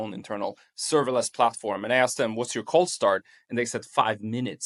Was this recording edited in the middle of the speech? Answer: no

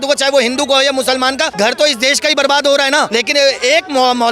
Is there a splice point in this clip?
yes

